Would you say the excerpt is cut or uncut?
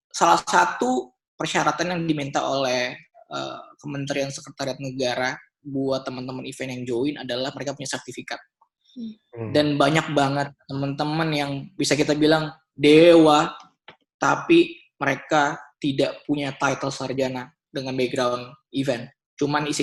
uncut